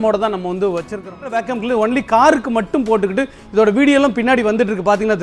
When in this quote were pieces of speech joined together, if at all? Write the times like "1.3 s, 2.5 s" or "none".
1.5 s